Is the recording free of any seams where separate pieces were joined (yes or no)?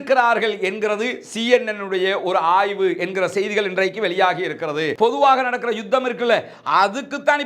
no